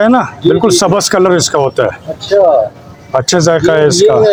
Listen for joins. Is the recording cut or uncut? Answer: uncut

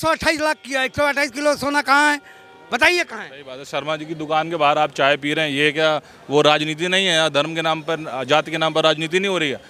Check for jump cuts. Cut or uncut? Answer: uncut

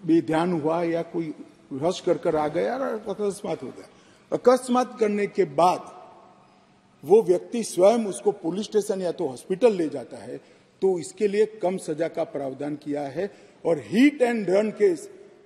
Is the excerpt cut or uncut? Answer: uncut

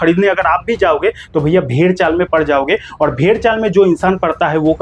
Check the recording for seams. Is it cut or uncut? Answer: uncut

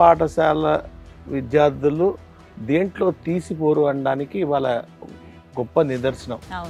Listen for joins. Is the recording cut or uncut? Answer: uncut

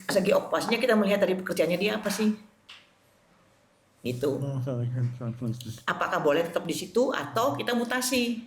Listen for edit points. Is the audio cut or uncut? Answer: uncut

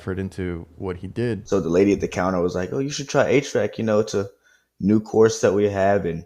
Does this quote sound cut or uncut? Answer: cut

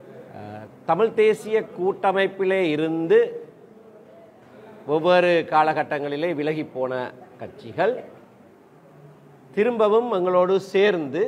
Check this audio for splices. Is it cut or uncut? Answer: uncut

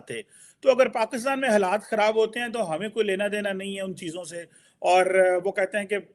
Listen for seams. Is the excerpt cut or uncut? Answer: uncut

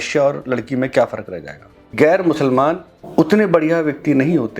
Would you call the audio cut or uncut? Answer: cut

